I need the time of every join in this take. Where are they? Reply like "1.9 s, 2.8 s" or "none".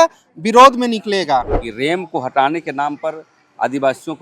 1.6 s